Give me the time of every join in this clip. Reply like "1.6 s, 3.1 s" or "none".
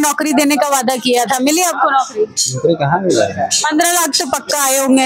none